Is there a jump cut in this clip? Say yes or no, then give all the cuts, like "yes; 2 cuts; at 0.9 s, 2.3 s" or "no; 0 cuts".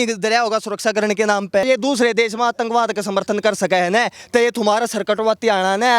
yes; 1 cut; at 1.7 s